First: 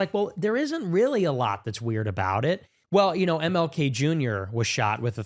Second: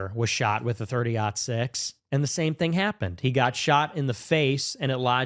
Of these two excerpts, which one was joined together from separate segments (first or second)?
first